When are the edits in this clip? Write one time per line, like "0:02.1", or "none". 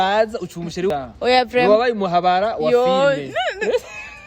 0:00.9

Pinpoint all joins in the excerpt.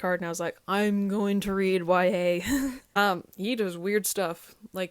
0:03.0

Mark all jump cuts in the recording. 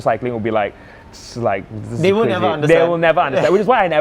none

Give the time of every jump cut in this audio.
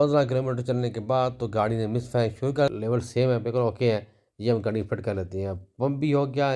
0:02.7

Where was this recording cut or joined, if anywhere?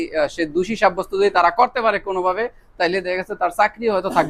none

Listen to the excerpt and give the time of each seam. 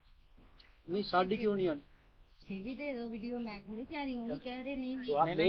none

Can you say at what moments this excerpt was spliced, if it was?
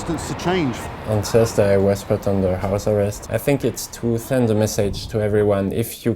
0:00.9
0:03.2

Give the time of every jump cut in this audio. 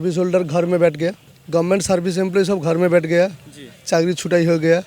0:01.3

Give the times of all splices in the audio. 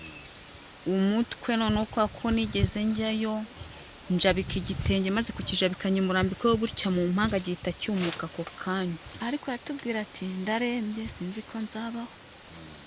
0:09.1

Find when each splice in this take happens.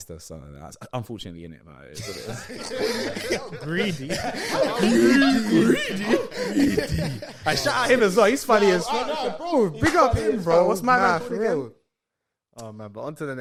none

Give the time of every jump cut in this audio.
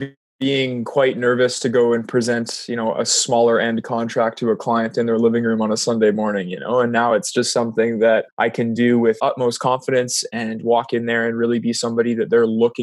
0:08.3
0:09.2

